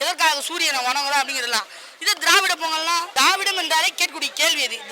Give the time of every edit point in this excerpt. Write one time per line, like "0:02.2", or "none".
0:03.1